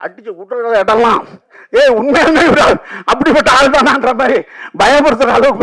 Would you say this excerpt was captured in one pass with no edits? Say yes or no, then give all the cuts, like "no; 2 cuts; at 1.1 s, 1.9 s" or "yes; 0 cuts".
yes; 0 cuts